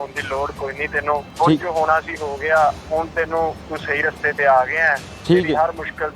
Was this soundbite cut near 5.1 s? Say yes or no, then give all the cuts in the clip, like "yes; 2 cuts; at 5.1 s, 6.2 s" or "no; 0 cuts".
yes; 2 cuts; at 1.3 s, 5.1 s